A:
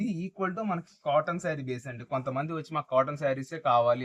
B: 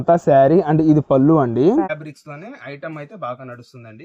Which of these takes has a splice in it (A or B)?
B